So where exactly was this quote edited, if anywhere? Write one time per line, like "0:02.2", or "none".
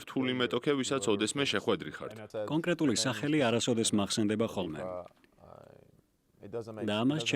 0:02.2